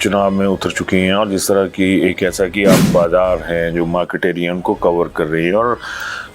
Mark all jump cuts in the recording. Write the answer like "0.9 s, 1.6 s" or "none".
2.9 s